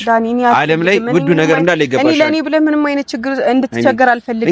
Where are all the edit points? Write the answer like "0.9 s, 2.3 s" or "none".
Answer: none

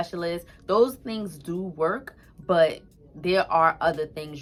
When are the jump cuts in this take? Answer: none

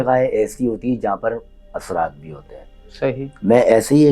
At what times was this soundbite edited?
none

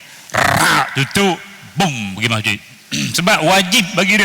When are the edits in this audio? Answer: 2.7 s

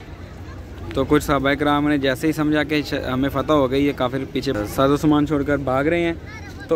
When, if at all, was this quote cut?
4.6 s

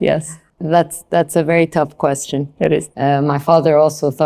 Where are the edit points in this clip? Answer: 2.9 s

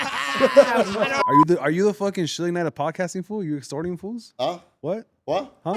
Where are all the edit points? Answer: 1.2 s

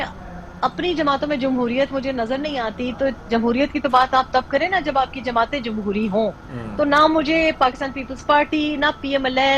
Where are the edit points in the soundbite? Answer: none

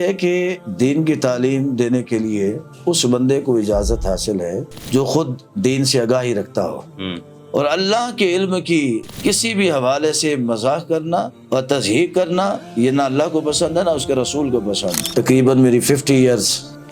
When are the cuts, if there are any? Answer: 7.4 s, 15.0 s

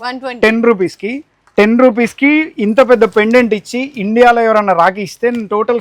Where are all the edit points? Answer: none

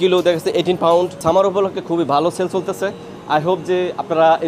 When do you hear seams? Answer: 1.2 s

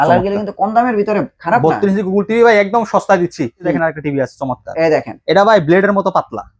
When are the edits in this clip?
3.7 s

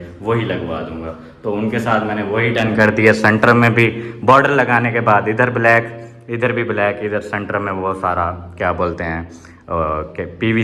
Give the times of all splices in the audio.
none

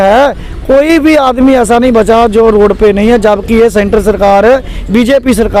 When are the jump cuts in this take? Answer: none

